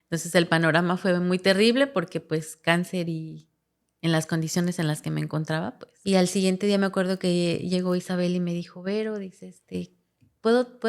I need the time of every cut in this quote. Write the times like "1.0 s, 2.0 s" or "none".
5.9 s